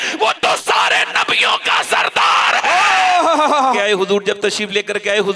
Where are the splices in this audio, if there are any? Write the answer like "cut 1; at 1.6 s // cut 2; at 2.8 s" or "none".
cut 1; at 3.8 s